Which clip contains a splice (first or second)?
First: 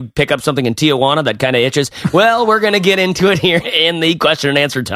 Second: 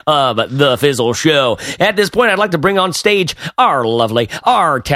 first